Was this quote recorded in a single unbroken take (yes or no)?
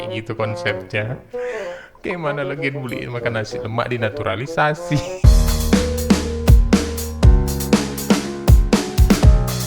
yes